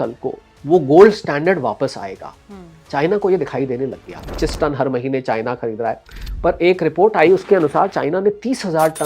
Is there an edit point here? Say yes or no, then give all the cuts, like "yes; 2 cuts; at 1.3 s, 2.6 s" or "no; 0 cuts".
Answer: yes; 1 cut; at 4.3 s